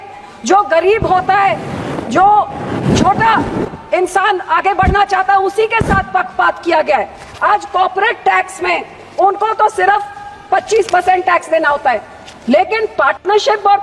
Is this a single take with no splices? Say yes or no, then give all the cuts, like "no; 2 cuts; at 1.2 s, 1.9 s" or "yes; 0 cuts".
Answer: yes; 0 cuts